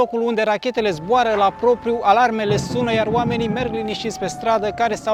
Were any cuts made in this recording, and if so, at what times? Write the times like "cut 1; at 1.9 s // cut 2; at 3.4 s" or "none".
none